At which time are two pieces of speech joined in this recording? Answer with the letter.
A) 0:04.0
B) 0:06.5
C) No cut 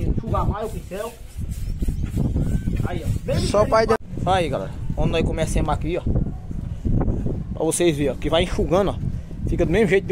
A